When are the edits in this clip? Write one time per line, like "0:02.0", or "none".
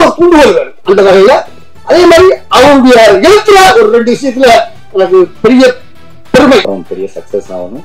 0:06.7